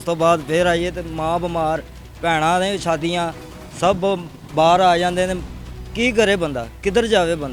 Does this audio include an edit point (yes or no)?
no